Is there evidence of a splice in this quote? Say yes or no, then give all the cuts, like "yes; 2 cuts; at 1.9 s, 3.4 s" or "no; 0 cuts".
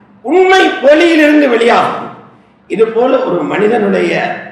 no; 0 cuts